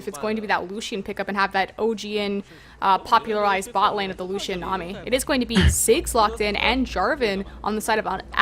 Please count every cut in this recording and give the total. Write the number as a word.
one